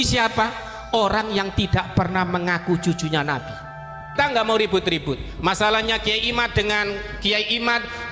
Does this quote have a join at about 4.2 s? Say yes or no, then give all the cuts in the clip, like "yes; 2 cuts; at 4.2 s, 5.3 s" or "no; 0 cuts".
yes; 1 cut; at 4.2 s